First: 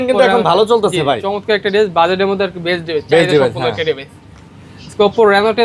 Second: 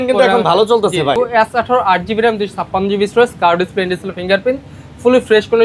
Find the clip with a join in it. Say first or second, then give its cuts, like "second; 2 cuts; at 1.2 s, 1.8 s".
second; 1 cut; at 1.2 s